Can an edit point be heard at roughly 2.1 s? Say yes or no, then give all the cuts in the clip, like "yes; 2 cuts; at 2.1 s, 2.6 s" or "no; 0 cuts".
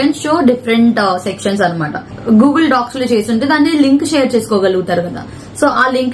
yes; 1 cut; at 2.1 s